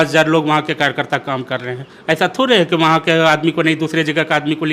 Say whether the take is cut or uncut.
uncut